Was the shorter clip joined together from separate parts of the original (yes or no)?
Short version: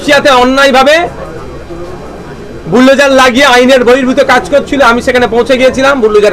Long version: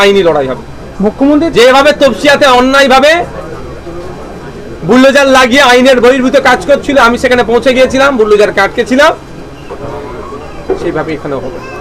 no